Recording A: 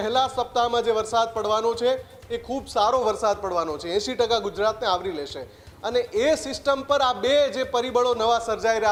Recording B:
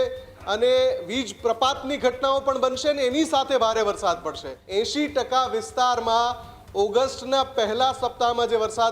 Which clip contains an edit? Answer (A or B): B